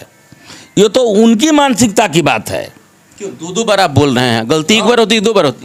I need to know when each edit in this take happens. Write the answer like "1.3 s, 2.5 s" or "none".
none